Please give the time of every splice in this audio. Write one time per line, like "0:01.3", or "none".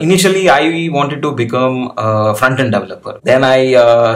0:03.2